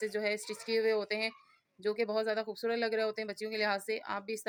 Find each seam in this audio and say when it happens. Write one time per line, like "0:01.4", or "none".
none